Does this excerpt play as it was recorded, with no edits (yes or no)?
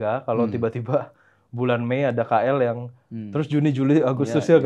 yes